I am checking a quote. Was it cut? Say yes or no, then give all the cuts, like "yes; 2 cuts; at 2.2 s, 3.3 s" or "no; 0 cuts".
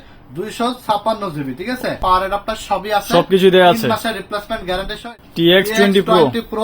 yes; 2 cuts; at 2.0 s, 5.1 s